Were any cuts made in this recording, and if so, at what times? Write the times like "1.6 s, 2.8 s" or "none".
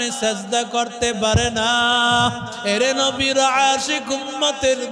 2.6 s